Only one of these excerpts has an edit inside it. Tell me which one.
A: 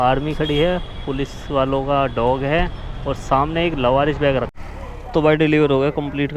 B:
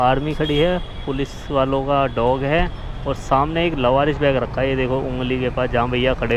A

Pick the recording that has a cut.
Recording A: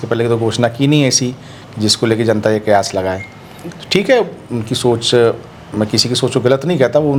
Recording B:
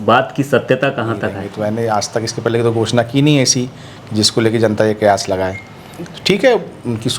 B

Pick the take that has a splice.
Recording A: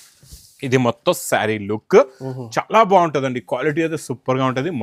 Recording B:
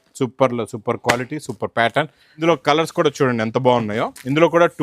B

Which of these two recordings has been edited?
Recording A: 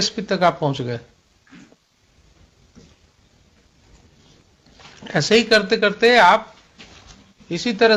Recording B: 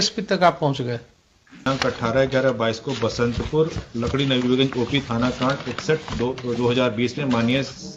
B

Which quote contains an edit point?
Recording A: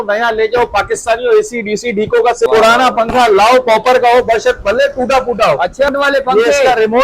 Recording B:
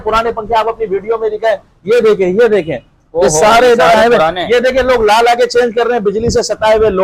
A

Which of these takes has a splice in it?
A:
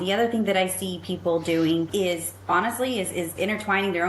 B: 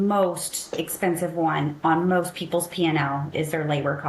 A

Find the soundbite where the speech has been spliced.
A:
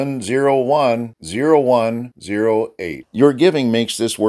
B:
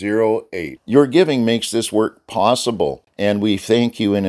B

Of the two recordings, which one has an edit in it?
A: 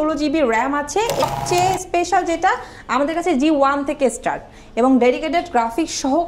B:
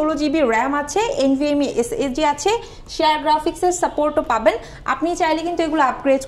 A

